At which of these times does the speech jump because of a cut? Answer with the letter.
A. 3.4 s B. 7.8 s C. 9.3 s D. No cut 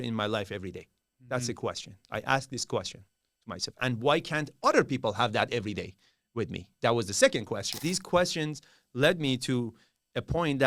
B